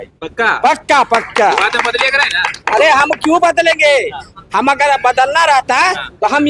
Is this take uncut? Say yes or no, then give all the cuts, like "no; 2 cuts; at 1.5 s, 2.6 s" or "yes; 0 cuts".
yes; 0 cuts